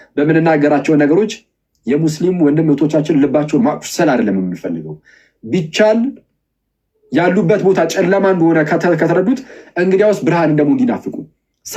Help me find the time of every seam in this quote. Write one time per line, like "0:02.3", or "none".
none